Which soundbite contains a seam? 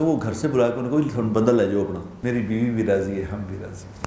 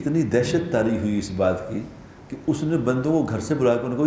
first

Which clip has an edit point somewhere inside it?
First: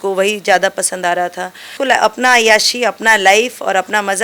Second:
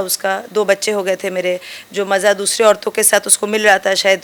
first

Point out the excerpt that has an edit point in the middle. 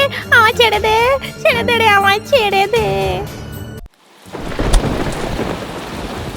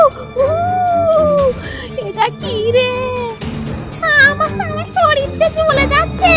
first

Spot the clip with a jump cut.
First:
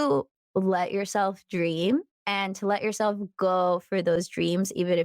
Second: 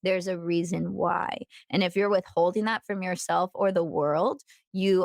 first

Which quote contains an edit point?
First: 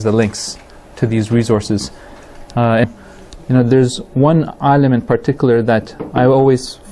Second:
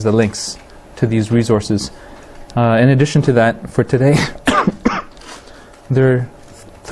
second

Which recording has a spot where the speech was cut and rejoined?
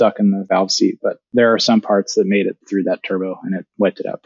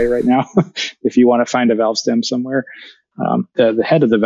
first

